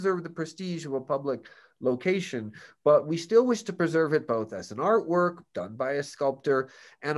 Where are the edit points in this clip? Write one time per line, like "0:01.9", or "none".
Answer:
none